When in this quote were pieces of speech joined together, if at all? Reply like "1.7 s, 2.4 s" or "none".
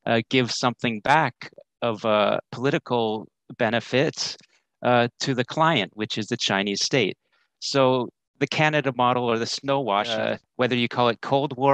10.2 s